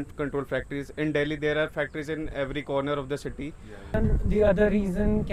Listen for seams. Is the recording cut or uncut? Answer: cut